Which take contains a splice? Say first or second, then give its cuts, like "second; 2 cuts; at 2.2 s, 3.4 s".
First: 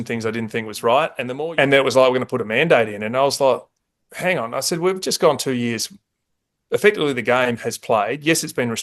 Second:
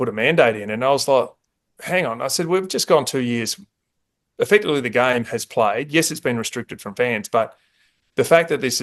first; 1 cut; at 1.2 s